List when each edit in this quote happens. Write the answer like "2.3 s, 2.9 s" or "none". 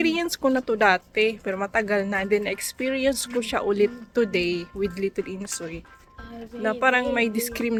none